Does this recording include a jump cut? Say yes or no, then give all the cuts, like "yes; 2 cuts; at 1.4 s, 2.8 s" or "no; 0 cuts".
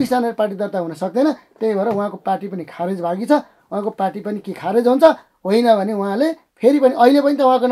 no; 0 cuts